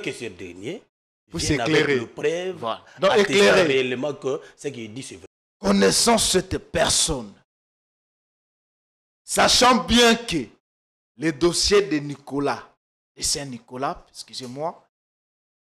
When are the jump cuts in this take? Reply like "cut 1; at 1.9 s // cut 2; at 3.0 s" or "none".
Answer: cut 1; at 5.1 s